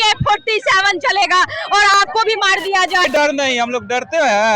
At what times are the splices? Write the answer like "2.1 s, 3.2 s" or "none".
3.0 s